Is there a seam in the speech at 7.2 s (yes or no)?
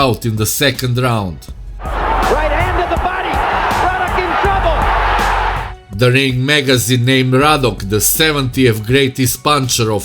no